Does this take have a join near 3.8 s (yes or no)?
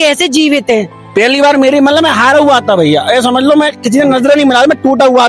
no